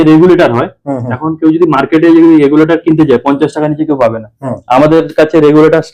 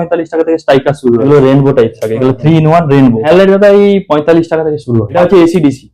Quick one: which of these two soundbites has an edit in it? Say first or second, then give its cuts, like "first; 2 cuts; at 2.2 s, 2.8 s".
second; 3 cuts; at 1.2 s, 3.2 s, 5.1 s